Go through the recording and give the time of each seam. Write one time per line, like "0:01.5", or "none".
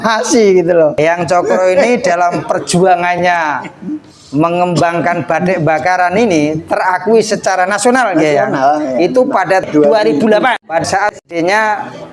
0:00.9
0:09.7
0:10.8